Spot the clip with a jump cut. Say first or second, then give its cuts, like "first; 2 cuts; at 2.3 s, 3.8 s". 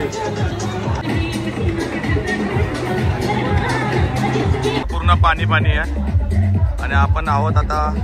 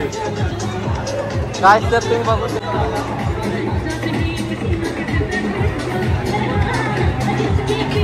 first; 2 cuts; at 1.0 s, 4.9 s